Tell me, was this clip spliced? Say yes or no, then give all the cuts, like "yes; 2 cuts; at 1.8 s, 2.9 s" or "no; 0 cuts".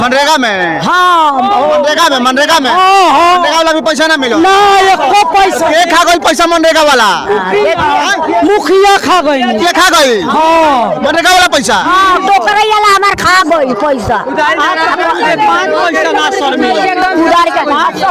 no; 0 cuts